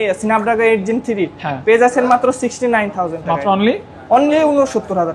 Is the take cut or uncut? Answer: uncut